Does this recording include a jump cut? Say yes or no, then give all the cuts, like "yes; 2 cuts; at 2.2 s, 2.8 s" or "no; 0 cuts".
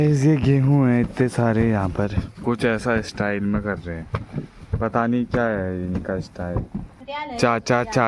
yes; 2 cuts; at 2.3 s, 7.0 s